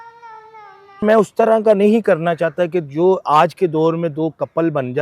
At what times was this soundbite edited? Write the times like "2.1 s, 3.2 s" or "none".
1.0 s